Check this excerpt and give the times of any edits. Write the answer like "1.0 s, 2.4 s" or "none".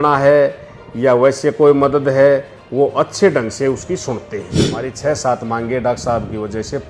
4.9 s